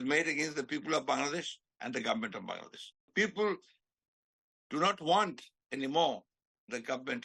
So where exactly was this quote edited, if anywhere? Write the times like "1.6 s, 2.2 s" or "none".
3.1 s